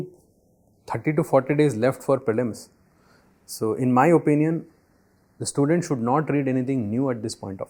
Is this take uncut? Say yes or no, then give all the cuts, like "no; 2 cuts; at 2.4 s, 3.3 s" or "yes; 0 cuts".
yes; 0 cuts